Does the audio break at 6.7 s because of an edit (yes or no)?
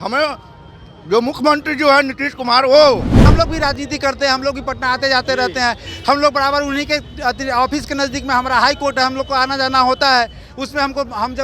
no